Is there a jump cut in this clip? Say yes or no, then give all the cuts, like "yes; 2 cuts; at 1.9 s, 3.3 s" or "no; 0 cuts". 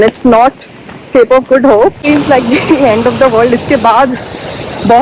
yes; 1 cut; at 2.0 s